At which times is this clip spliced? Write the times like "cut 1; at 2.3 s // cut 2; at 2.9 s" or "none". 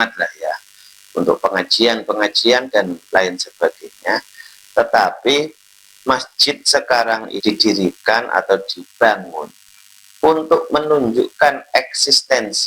cut 1; at 7.3 s